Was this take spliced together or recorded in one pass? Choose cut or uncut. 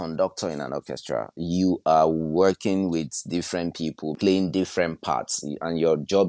cut